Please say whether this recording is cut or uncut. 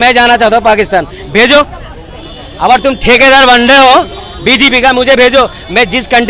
uncut